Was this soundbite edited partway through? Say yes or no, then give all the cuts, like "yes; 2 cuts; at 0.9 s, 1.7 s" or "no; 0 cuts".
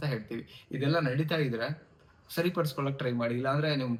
no; 0 cuts